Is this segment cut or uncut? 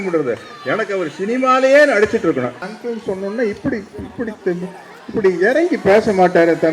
cut